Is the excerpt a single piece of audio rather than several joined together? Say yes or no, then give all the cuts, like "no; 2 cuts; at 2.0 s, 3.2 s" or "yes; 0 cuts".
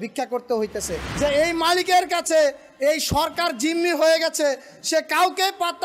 no; 1 cut; at 1.0 s